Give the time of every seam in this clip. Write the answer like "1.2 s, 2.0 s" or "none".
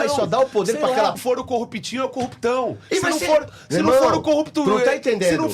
1.2 s